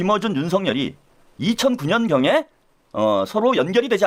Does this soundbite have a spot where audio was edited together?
no; 0 cuts

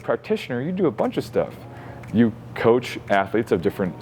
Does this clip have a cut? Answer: no; 0 cuts

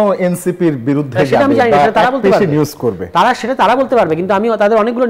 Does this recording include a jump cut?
no; 0 cuts

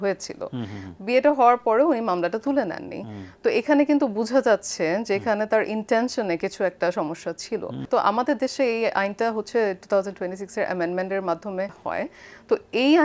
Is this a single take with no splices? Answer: no; 2 cuts; at 7.8 s, 11.8 s

